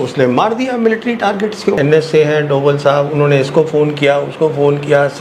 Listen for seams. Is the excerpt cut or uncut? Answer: cut